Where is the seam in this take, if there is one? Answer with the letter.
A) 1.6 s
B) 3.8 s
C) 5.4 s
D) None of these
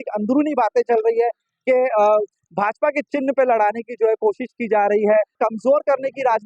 C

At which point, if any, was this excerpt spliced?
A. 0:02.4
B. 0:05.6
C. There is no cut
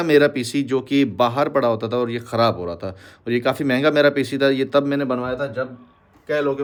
C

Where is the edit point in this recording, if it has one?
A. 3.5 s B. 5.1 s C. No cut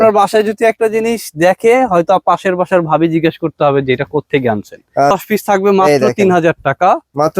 B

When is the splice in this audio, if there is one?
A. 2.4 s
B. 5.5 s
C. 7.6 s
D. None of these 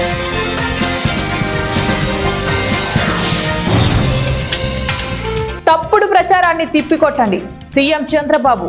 B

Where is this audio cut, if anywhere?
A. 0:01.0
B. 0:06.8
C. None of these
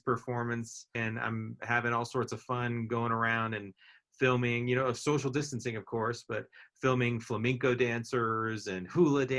A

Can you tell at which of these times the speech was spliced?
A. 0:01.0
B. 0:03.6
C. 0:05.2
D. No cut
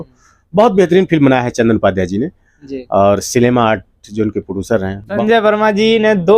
C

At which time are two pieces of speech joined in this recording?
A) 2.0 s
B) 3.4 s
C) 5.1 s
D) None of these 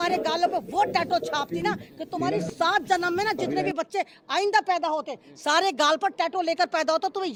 D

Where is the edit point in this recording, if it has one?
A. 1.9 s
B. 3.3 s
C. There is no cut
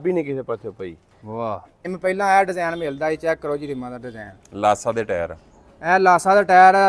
A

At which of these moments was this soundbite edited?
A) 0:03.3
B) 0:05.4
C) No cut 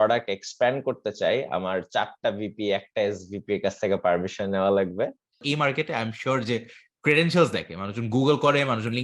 B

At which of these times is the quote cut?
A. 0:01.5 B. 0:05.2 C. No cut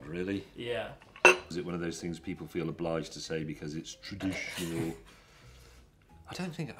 A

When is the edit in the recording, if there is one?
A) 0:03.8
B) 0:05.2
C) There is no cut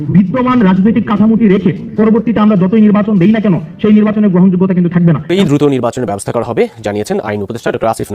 B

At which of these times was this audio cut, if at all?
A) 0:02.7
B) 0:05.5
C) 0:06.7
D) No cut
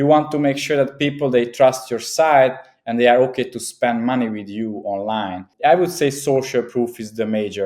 B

